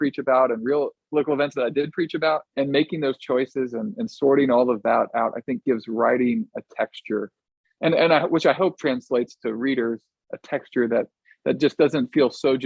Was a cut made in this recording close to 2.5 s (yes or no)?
yes